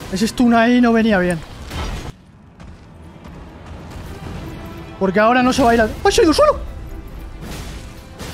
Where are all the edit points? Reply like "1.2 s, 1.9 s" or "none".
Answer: 2.1 s